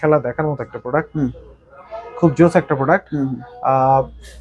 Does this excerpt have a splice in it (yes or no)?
no